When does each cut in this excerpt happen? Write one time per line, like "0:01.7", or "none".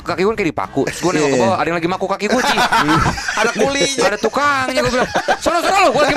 none